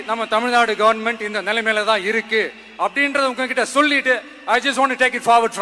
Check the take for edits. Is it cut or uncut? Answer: uncut